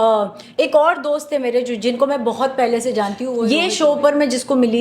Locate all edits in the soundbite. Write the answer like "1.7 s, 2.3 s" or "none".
3.4 s